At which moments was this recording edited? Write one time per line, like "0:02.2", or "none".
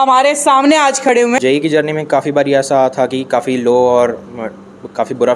0:01.4